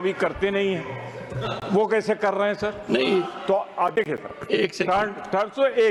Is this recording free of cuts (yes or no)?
yes